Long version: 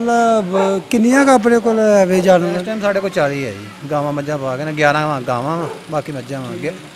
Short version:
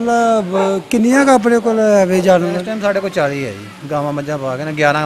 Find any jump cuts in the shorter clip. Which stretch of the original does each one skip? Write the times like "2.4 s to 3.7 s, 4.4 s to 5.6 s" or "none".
none